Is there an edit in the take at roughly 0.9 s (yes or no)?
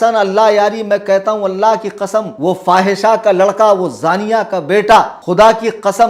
no